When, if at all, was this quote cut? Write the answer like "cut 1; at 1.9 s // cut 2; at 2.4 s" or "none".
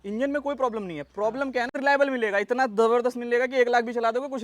cut 1; at 1.8 s